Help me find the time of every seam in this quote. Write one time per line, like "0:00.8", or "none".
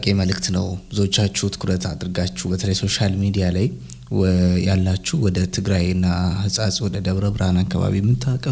none